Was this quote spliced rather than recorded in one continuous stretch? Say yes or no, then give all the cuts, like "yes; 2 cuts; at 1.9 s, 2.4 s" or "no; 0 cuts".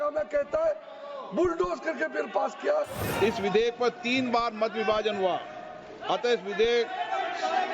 yes; 1 cut; at 3.0 s